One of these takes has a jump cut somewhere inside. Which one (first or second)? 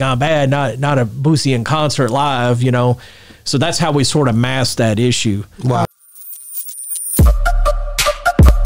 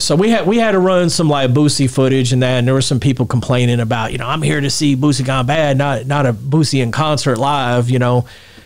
first